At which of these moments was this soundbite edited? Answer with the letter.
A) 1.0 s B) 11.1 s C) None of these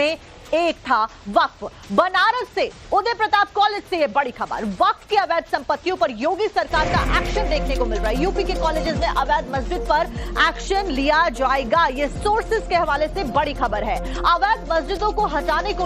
B